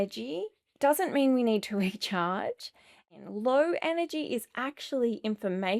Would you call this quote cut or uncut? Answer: cut